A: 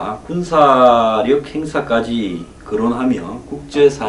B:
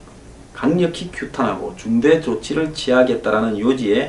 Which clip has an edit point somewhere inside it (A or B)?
A